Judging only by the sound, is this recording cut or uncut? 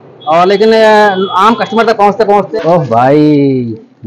cut